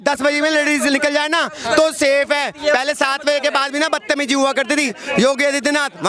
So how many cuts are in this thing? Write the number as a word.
one